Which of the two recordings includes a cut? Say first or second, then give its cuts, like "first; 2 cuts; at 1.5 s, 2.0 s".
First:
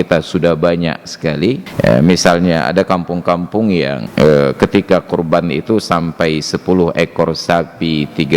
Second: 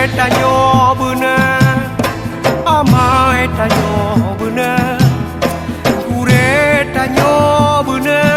first; 2 cuts; at 1.7 s, 4.0 s